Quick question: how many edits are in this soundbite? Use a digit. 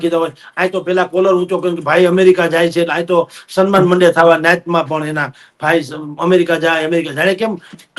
0